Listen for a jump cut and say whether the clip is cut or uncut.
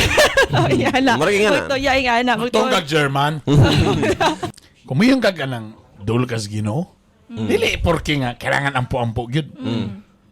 cut